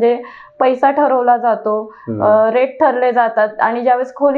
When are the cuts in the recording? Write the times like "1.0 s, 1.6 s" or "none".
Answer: none

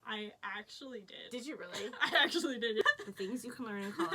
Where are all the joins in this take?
2.8 s

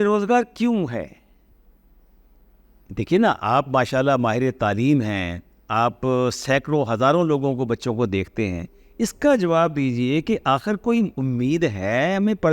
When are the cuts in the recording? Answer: none

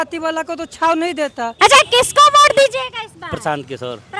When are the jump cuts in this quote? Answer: 1.5 s

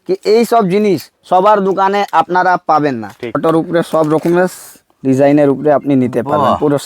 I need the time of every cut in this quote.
3.4 s

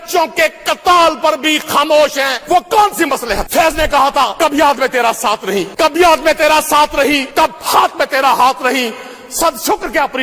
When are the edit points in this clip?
2.4 s, 3.5 s, 4.3 s, 5.7 s, 7.3 s

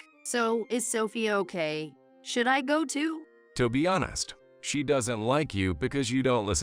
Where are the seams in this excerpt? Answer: 3.3 s

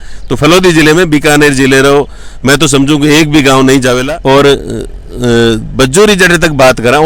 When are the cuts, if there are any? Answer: 4.0 s

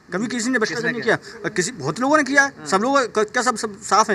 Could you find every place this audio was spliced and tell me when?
none

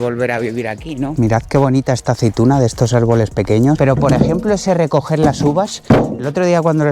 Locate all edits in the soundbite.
1.1 s, 3.8 s

